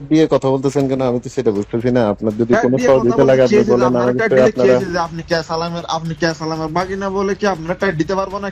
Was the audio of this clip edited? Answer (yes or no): no